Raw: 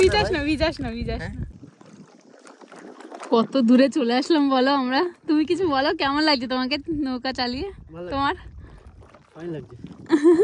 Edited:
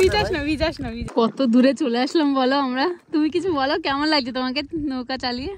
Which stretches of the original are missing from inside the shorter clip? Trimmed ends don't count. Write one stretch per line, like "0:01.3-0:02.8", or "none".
0:00.9-0:03.1

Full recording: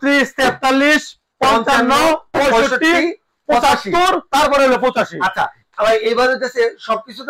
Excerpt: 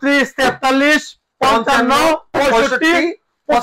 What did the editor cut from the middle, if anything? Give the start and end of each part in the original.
none

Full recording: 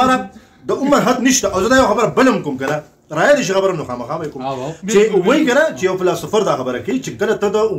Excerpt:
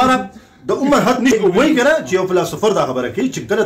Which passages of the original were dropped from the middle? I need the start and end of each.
0:01.3-0:05.0

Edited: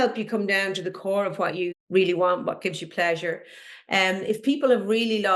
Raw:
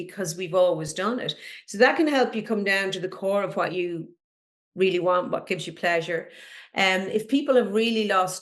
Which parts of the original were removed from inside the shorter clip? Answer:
0:04.0-0:04.6

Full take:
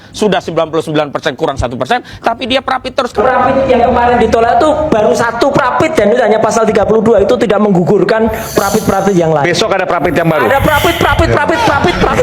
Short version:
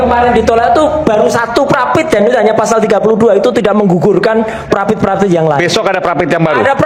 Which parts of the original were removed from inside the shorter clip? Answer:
none

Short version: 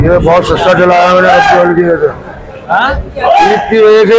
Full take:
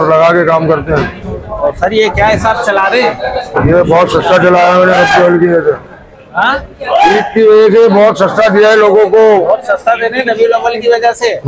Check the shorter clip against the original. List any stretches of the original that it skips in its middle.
none

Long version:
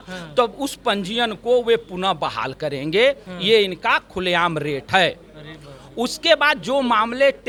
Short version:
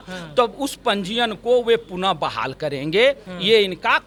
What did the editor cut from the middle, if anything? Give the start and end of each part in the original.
none

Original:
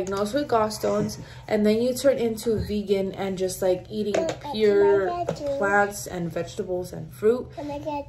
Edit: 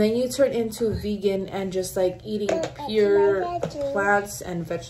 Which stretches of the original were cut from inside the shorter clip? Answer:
none

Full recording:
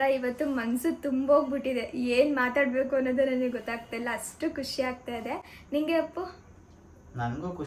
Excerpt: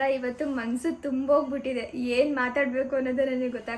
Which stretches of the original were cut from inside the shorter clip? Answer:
none

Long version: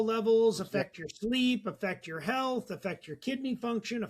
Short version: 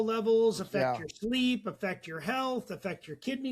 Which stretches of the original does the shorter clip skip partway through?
none

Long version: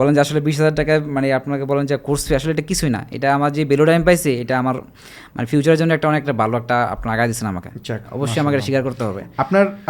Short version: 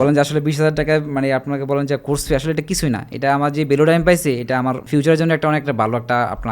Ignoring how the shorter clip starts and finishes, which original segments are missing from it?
0:04.8-0:05.4

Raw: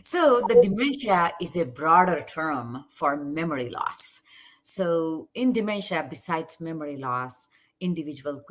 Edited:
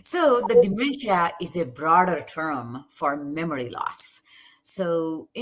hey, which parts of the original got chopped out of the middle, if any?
none

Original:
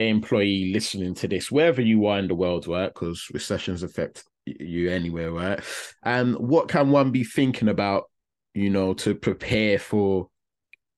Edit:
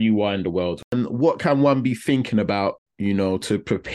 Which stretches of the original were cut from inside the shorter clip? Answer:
0:02.7-0:06.2
0:08.2-0:08.4

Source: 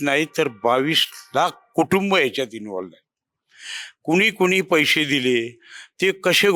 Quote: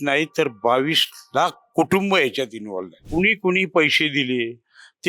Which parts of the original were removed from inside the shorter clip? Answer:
0:03.0-0:03.9

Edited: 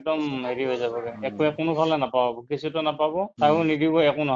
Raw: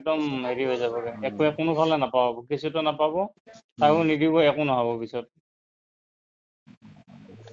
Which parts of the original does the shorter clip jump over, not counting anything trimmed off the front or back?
0:03.3-0:03.7

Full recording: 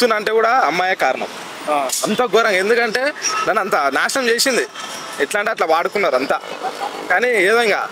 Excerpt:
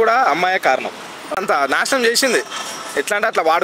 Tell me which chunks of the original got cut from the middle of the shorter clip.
0:01.7-0:03.6

